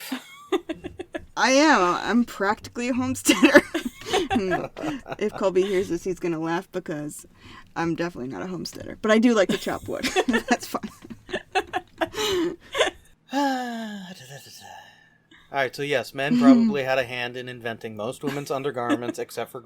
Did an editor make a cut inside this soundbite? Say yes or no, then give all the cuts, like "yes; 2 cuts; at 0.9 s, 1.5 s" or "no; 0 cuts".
yes; 1 cut; at 13.1 s